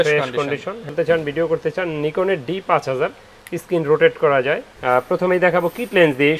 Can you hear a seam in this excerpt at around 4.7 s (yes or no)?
yes